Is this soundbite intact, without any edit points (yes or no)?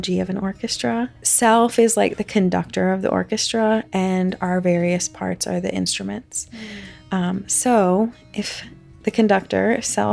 no